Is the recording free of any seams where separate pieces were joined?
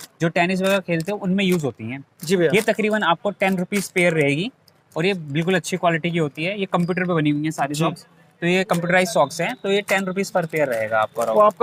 yes; 0 cuts

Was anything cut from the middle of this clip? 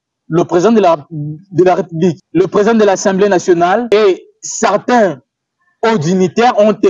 yes; 2 cuts; at 2.2 s, 3.8 s

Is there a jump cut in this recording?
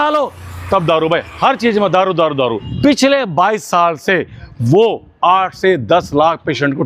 yes; 1 cut; at 2.7 s

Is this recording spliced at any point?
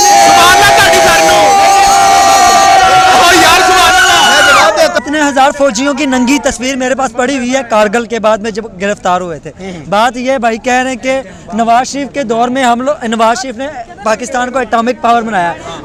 no; 0 cuts

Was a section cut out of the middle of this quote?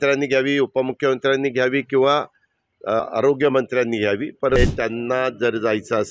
yes; 2 cuts; at 3.1 s, 4.6 s

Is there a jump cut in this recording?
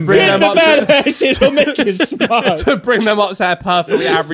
no; 0 cuts

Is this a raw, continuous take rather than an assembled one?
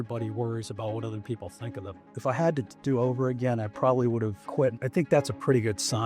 no; 2 cuts; at 2.1 s, 4.7 s

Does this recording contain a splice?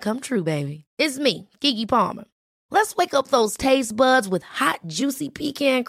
no; 0 cuts

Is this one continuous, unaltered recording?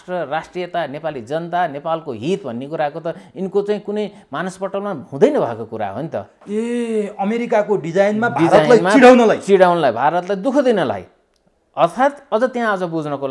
yes; 0 cuts

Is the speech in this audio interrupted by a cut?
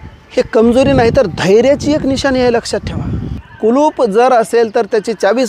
yes; 1 cut; at 3.4 s

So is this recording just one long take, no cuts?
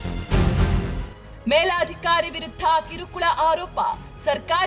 no; 1 cut; at 1.2 s

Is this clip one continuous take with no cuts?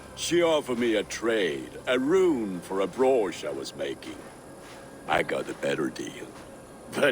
yes; 0 cuts

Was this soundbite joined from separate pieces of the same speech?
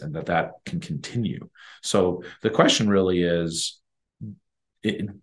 no; 0 cuts

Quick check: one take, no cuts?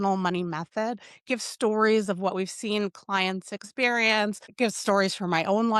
no; 1 cut; at 4.4 s

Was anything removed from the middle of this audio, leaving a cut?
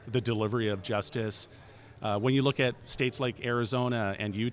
no; 0 cuts

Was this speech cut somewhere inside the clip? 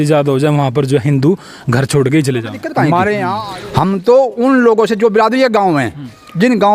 yes; 1 cut; at 3.4 s

